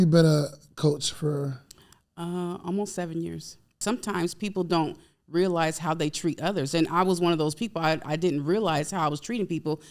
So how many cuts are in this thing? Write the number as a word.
one